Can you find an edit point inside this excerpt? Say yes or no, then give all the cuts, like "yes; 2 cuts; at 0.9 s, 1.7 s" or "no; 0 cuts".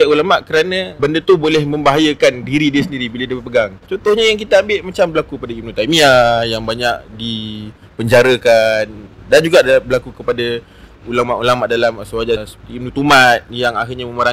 yes; 3 cuts; at 0.9 s, 3.8 s, 12.5 s